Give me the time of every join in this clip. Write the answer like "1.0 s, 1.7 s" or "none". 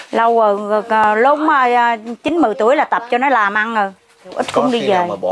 4.4 s